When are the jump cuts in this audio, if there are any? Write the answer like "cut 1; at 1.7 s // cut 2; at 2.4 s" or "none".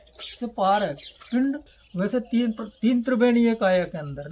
cut 1; at 1.7 s